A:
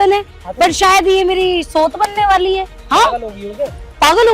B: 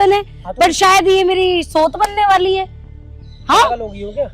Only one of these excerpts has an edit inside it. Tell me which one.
A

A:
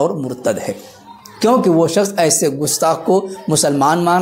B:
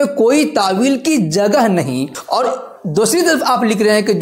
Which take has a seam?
B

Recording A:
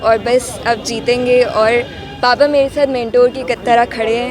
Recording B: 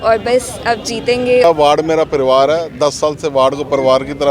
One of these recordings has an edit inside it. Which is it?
B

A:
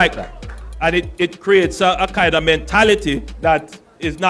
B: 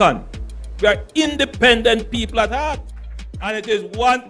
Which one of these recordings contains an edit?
B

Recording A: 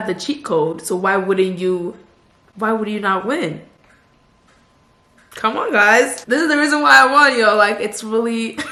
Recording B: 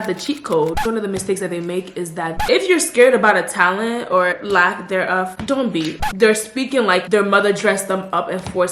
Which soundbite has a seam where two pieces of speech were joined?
B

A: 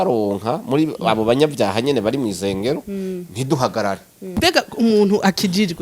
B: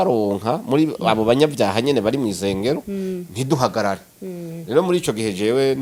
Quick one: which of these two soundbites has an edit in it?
A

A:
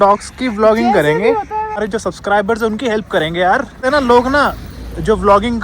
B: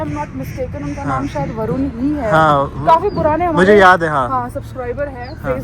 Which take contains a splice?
A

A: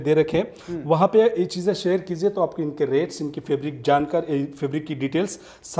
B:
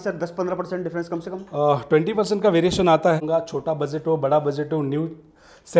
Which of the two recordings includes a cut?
B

